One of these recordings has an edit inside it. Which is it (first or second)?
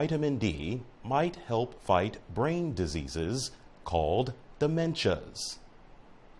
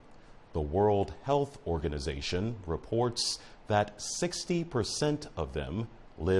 first